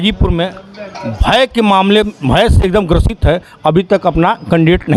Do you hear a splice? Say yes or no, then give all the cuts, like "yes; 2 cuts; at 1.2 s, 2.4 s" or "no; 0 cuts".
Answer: no; 0 cuts